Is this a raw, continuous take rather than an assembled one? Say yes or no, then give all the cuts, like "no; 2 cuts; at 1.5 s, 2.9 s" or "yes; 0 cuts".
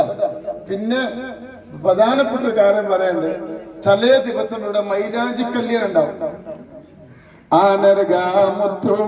yes; 0 cuts